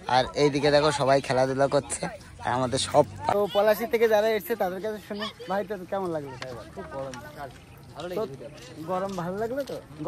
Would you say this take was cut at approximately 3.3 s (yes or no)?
yes